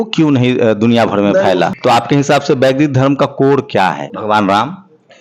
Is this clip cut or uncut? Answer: cut